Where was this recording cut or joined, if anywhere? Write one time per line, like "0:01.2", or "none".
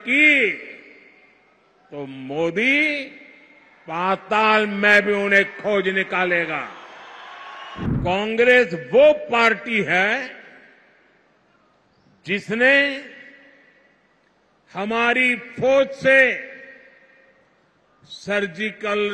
0:07.9